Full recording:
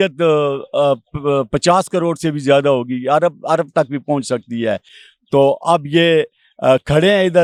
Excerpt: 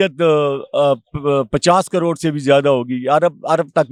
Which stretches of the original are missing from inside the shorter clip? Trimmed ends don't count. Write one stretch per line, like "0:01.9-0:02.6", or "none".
none